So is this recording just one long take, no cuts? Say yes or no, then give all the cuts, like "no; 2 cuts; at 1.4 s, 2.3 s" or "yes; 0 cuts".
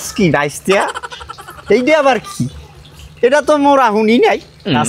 yes; 0 cuts